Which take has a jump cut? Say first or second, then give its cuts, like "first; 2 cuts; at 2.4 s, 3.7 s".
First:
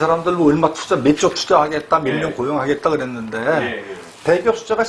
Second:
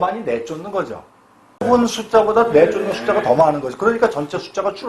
second; 1 cut; at 1.6 s